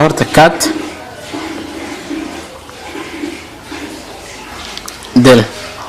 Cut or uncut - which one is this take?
uncut